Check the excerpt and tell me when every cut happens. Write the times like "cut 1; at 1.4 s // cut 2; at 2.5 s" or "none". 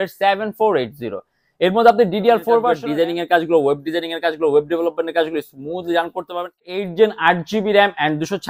cut 1; at 2.8 s // cut 2; at 6.7 s